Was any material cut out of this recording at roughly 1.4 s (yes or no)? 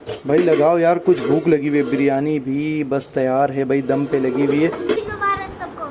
no